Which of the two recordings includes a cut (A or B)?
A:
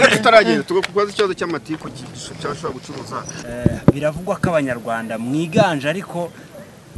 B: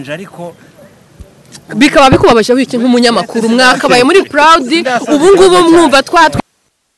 A